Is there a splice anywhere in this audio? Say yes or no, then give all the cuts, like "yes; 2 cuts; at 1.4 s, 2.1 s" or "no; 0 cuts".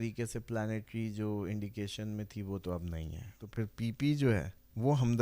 yes; 1 cut; at 3.4 s